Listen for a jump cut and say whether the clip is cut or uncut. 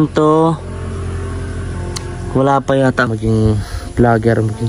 cut